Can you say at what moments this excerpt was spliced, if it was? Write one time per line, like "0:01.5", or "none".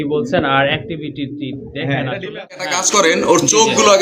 0:02.6